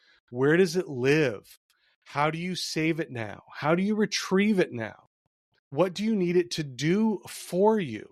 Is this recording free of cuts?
yes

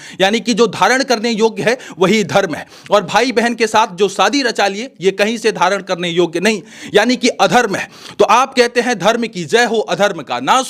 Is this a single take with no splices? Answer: yes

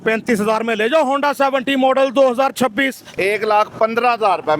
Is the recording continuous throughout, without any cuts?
no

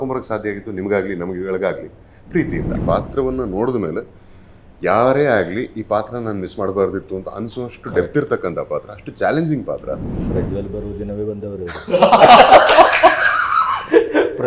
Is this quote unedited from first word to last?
no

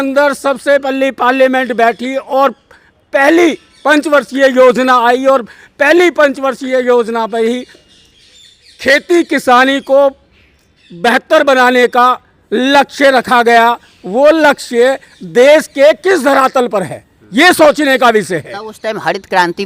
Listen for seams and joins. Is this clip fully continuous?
yes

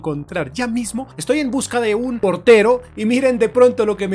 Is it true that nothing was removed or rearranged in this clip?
no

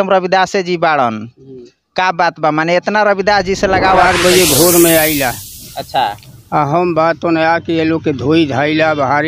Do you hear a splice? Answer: yes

